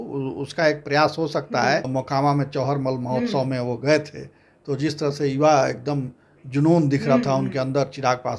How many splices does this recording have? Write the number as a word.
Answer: one